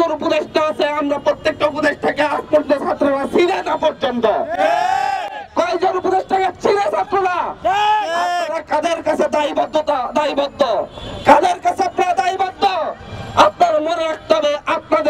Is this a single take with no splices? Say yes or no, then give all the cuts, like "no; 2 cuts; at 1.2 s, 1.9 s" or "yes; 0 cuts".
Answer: yes; 0 cuts